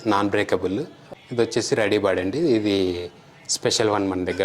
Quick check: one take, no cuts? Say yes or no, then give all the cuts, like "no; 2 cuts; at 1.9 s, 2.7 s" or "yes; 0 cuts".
no; 1 cut; at 1.1 s